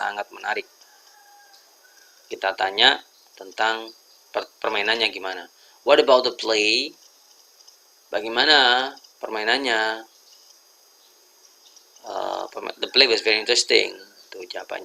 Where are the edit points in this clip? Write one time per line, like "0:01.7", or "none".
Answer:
none